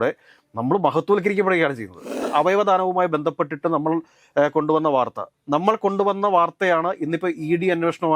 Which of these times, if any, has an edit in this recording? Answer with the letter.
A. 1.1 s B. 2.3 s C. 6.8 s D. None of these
B